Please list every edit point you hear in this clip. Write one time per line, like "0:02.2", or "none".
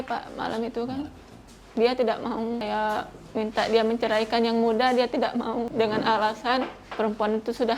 0:02.6
0:05.7
0:06.8